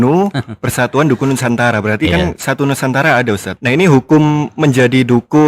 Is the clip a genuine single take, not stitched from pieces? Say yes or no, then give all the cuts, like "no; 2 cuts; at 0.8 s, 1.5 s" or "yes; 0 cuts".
no; 1 cut; at 3.5 s